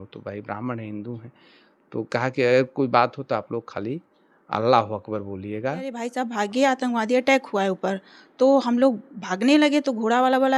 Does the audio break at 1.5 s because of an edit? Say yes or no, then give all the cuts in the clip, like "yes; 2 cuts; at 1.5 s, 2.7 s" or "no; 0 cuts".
no; 1 cut; at 6.0 s